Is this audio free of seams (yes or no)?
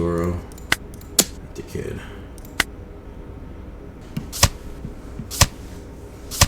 no